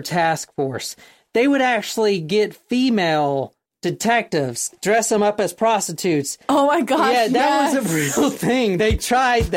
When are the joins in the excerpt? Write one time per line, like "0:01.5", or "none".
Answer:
0:03.6
0:04.7